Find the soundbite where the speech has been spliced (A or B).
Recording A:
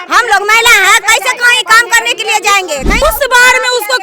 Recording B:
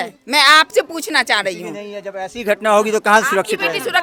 A